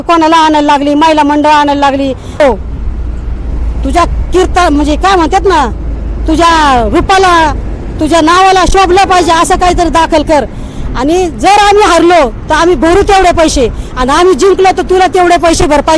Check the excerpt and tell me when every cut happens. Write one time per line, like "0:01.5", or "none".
0:02.4